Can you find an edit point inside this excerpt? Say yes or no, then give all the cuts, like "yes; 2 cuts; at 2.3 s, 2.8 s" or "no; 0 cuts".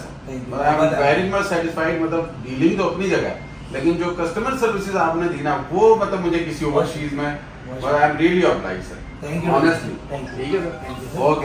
no; 0 cuts